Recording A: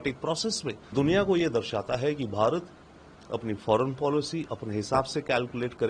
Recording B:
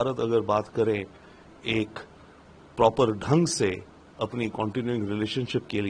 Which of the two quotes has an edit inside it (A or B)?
A